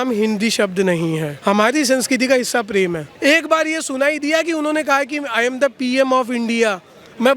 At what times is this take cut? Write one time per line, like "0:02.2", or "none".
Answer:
0:01.3
0:03.1